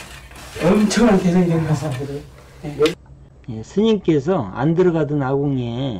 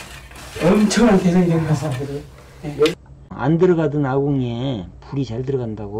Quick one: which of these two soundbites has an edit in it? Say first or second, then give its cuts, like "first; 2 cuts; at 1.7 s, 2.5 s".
second; 1 cut; at 3.3 s